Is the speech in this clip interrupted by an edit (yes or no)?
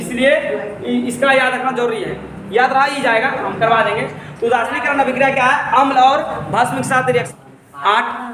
yes